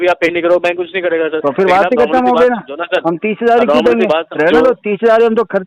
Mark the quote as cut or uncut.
uncut